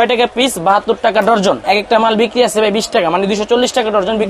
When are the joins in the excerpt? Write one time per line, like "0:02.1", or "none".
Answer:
none